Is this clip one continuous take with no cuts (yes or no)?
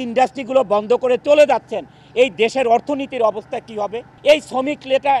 no